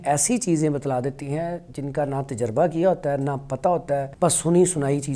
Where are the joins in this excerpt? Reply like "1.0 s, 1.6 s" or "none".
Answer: 4.1 s